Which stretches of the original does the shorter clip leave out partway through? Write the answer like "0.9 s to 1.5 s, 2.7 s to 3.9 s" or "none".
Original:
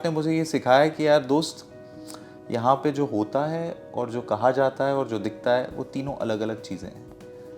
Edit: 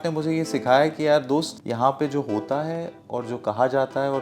1.6 s to 2.4 s